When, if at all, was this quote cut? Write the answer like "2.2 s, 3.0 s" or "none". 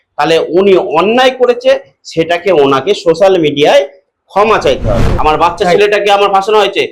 5.1 s